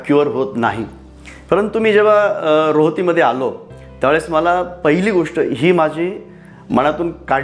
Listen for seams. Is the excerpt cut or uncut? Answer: uncut